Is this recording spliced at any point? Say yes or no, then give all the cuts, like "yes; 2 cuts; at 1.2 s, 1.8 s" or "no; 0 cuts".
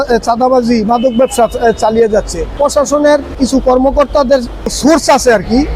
yes; 3 cuts; at 2.5 s, 3.4 s, 4.8 s